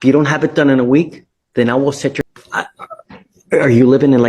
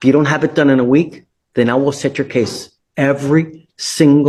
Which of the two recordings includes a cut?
first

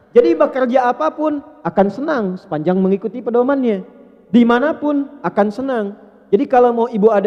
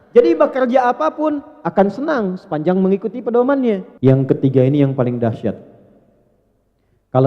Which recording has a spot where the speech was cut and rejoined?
second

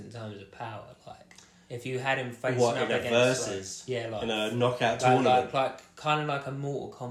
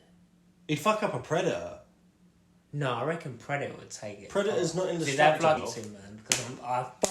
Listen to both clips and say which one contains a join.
second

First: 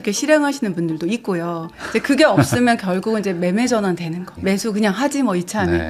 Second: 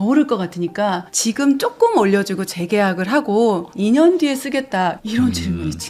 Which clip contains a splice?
first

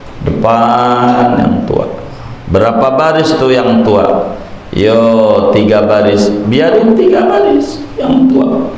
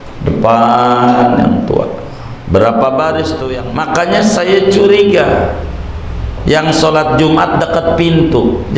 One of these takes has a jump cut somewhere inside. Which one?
second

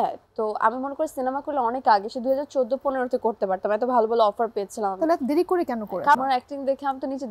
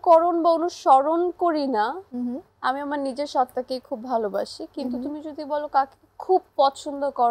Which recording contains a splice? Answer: first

